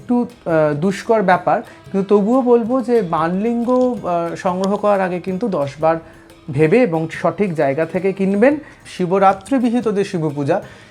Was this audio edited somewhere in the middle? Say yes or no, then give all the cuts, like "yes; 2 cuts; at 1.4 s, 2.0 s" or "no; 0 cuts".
yes; 1 cut; at 8.8 s